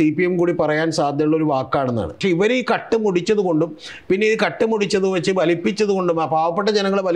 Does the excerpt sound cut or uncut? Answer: cut